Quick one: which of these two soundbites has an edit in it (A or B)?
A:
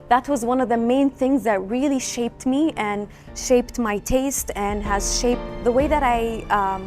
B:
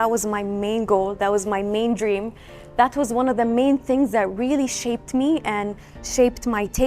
A